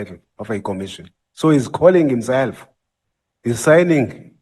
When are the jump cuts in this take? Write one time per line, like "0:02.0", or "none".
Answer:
none